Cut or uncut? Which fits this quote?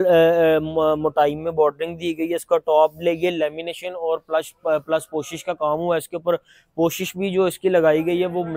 uncut